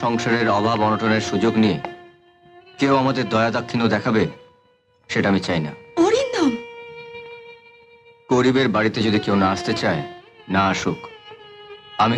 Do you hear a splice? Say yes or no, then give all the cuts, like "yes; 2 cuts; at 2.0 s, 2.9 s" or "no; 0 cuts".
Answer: no; 0 cuts